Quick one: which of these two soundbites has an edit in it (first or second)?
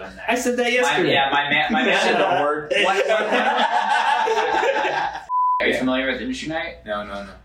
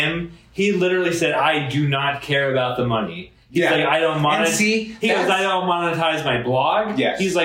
first